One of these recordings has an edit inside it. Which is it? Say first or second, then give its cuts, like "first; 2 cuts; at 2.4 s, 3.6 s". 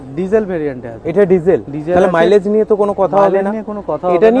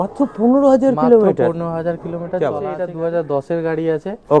second; 1 cut; at 2.9 s